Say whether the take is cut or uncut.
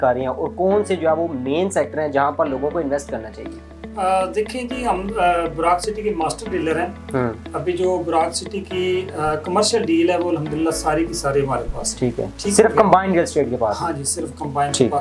uncut